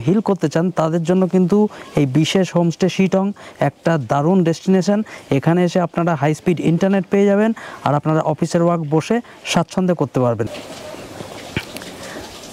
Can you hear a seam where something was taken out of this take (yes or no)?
yes